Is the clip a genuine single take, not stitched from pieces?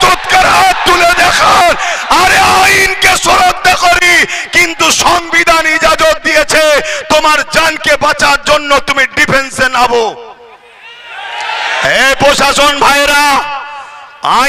yes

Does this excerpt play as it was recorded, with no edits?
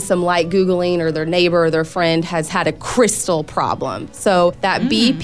yes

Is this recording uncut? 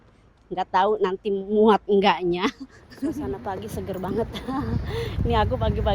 no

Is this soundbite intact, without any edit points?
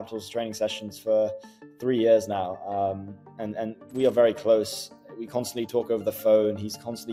yes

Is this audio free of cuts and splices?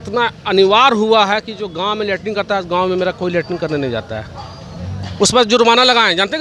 yes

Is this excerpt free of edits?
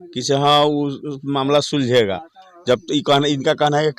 yes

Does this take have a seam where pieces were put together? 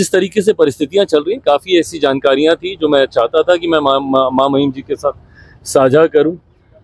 no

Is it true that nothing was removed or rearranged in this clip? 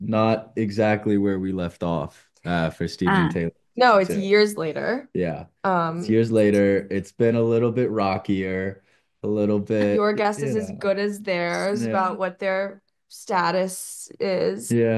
yes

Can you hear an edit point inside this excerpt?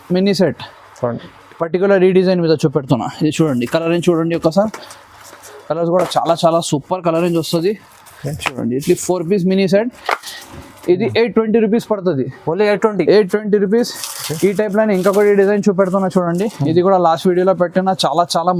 no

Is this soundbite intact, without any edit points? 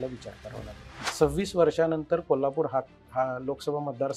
no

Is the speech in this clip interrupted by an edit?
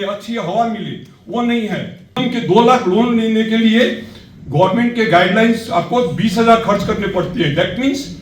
yes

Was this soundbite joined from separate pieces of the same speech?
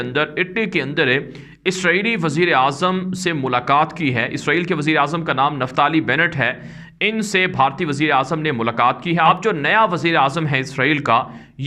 yes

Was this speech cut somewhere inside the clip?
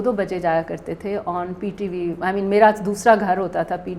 no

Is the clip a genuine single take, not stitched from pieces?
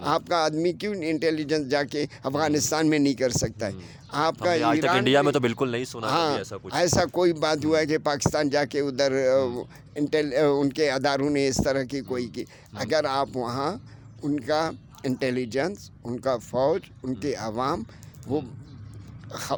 yes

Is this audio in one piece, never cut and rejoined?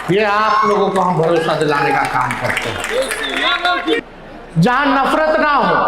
no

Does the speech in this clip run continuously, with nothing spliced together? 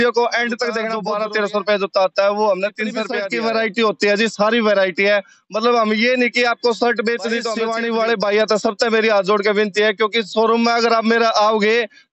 no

